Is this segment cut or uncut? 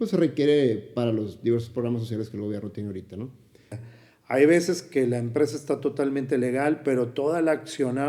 cut